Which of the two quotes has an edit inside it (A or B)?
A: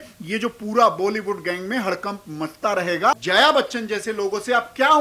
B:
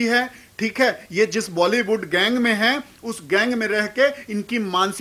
A